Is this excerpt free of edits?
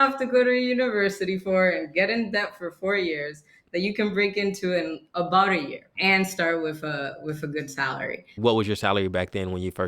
no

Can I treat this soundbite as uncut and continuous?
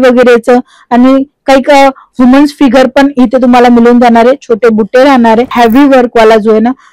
no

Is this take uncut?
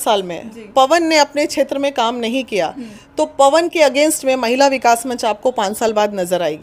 yes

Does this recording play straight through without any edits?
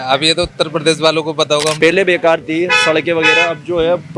no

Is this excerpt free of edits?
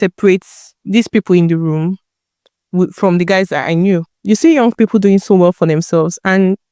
no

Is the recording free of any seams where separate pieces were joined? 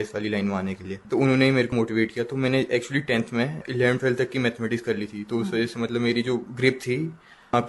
no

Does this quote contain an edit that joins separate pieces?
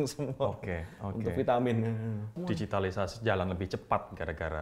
yes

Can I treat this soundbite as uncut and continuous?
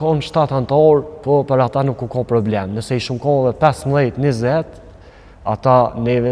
yes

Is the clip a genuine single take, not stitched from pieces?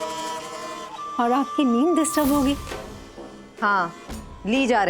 no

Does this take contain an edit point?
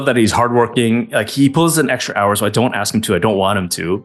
no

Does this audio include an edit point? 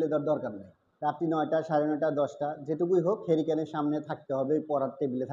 yes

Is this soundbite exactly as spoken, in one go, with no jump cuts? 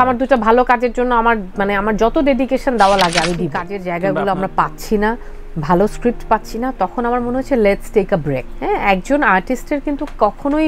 no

